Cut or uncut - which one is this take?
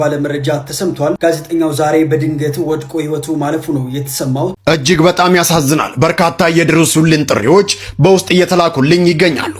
cut